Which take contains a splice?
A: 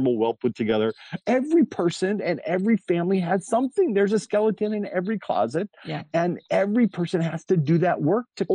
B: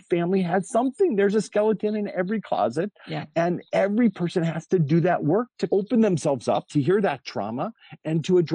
A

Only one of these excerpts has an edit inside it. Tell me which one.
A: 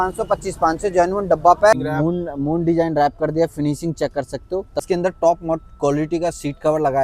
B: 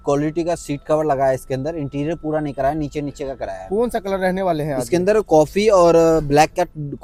A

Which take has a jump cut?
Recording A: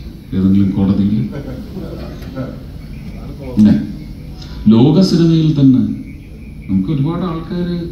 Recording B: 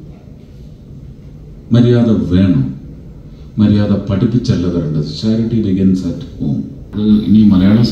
B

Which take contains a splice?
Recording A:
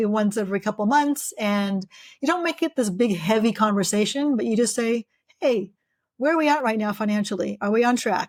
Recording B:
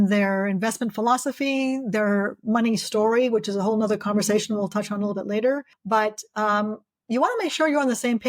B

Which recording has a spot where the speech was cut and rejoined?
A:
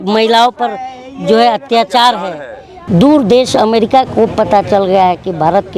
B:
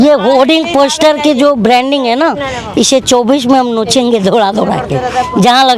A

